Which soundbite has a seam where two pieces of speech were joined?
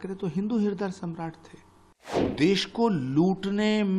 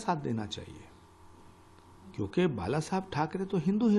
first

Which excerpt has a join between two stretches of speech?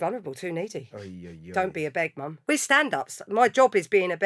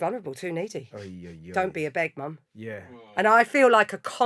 first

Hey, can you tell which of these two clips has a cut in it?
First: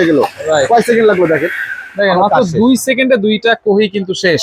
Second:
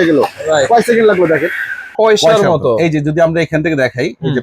second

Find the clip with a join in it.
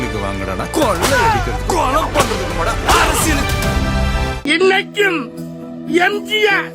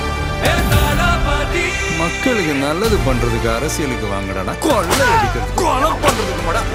first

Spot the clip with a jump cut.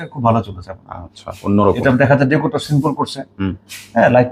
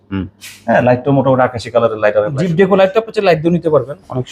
second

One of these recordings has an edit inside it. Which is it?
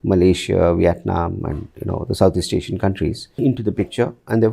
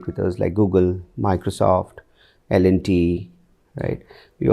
first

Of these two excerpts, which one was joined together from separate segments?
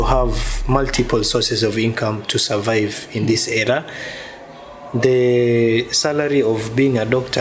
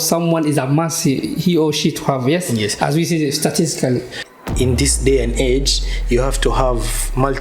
second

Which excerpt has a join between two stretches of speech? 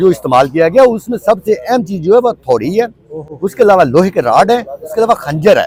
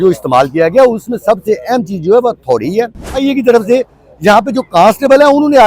second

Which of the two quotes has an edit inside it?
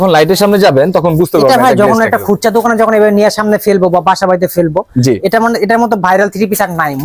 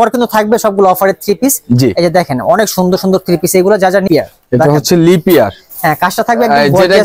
second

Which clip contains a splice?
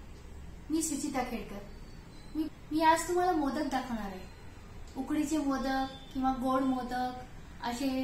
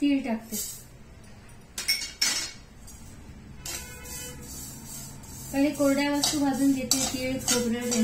first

